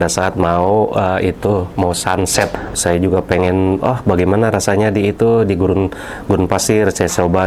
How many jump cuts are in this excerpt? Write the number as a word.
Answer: one